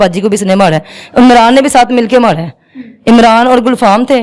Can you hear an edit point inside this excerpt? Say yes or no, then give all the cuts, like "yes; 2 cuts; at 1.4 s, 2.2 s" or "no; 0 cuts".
no; 0 cuts